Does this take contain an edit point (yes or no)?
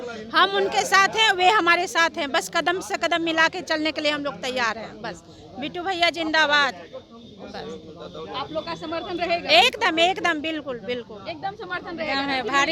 no